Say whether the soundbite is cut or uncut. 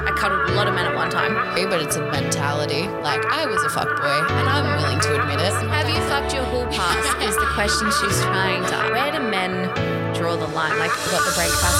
uncut